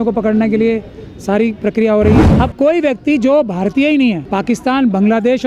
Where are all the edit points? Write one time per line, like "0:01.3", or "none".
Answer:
0:02.3
0:04.2